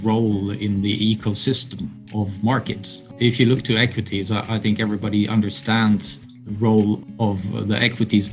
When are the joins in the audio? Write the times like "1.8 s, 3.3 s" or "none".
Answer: 3.1 s, 7.0 s